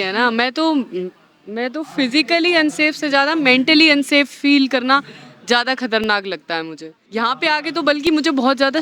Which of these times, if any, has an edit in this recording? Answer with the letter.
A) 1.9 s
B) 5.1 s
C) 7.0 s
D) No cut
C